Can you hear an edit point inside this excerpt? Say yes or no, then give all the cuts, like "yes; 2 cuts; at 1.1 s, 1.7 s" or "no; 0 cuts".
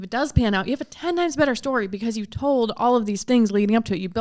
no; 0 cuts